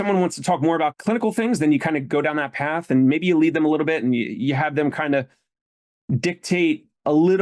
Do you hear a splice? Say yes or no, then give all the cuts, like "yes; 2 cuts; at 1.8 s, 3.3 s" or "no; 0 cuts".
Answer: yes; 1 cut; at 1.0 s